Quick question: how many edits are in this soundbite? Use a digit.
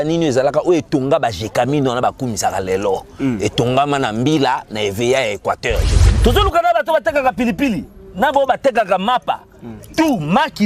1